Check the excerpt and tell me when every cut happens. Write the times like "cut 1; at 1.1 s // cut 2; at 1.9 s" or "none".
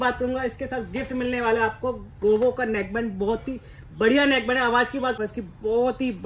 cut 1; at 5.2 s